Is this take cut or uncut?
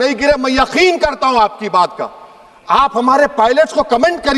uncut